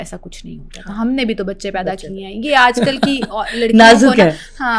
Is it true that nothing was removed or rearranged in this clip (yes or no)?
yes